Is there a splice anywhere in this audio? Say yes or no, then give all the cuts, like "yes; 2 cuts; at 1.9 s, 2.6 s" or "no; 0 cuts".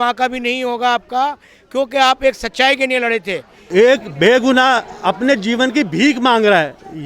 yes; 1 cut; at 3.5 s